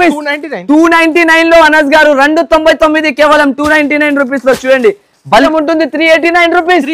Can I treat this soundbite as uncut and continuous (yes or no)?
no